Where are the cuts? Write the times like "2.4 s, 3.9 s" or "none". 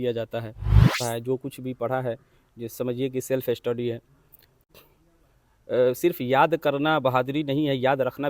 1.0 s, 4.6 s